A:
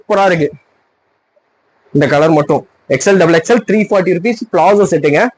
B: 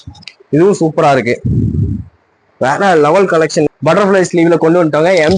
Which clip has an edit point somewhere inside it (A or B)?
B